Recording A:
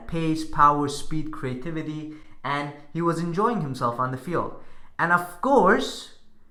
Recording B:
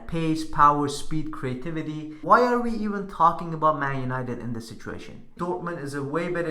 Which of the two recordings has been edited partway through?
B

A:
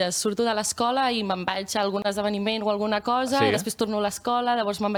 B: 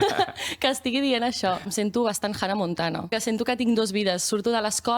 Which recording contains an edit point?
B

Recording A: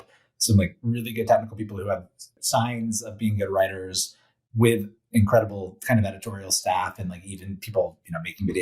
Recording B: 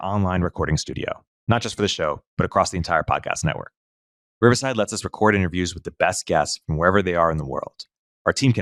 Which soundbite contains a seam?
A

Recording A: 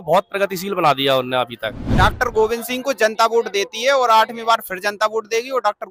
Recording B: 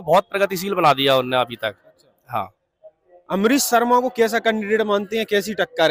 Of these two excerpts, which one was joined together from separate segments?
A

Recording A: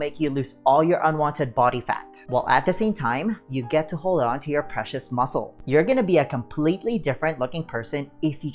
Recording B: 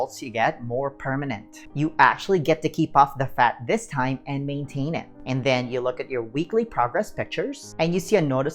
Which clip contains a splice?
B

